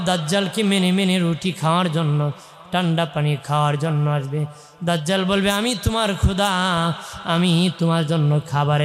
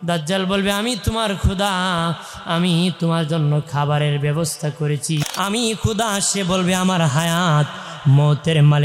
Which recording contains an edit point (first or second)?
second